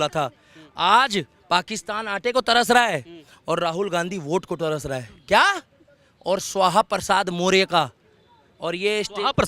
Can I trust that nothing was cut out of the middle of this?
yes; 0 cuts

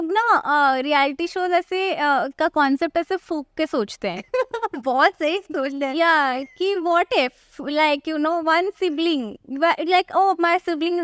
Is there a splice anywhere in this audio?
no; 0 cuts

